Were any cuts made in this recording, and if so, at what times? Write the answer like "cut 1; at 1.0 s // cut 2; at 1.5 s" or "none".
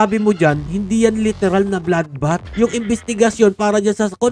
cut 1; at 2.5 s